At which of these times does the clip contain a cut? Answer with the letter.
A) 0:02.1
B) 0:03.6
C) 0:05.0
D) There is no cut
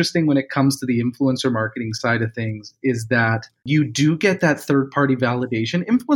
B